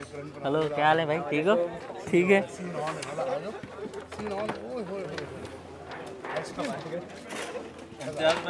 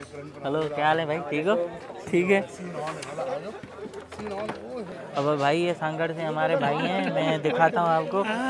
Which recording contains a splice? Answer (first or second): second